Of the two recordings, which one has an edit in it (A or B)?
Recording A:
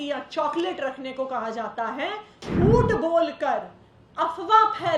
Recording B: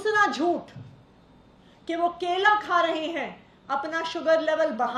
A